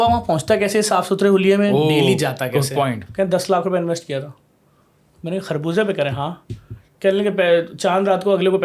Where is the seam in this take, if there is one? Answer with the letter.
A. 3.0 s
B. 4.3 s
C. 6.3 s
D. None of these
A